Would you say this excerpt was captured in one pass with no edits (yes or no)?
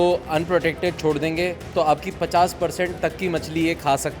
yes